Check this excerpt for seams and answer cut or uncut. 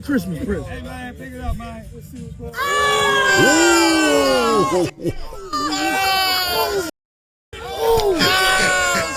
uncut